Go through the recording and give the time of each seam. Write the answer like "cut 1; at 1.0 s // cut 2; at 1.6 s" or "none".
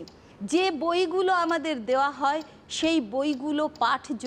none